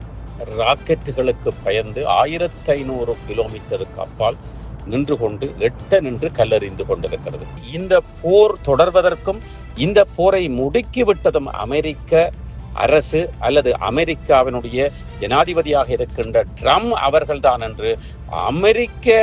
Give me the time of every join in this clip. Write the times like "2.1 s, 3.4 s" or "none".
7.5 s